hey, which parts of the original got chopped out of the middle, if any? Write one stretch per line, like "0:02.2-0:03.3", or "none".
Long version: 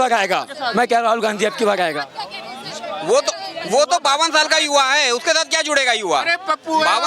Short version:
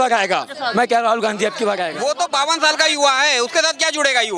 0:01.9-0:03.7